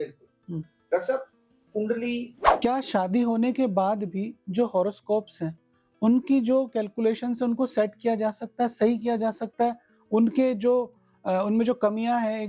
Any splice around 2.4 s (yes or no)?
yes